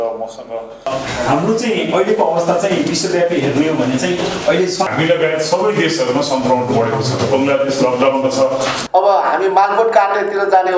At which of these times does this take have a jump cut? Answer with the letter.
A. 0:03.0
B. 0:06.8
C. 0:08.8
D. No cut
C